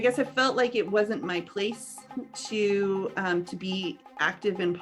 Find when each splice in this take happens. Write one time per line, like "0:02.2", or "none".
none